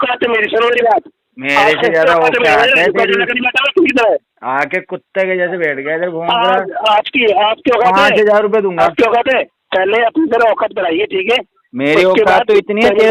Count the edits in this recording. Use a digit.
1